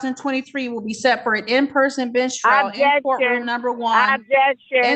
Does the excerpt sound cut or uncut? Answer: uncut